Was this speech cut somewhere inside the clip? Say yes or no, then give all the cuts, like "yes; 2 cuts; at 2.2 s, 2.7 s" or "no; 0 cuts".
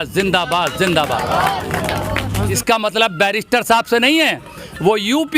yes; 1 cut; at 2.6 s